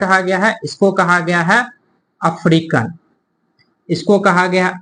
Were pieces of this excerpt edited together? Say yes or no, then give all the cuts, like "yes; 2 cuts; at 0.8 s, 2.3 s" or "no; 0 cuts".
no; 0 cuts